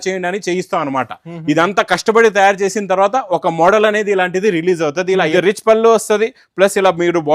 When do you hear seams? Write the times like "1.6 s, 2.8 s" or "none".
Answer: 5.3 s